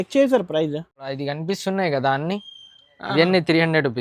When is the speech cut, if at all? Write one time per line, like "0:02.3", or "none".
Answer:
none